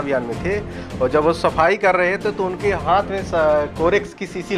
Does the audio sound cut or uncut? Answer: uncut